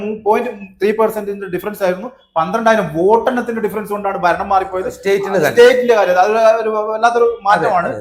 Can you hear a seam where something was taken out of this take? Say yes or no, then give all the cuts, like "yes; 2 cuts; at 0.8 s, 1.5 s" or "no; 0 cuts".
no; 0 cuts